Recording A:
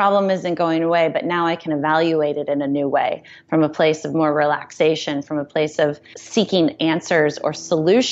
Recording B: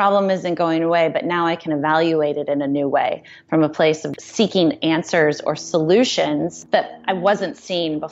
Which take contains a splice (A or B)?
B